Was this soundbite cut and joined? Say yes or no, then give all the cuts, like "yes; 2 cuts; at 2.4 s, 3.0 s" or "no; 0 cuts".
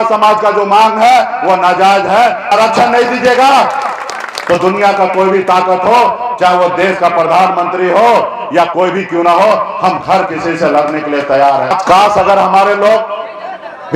yes; 2 cuts; at 2.5 s, 11.7 s